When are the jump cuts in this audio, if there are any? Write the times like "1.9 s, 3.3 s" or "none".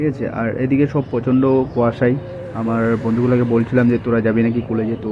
none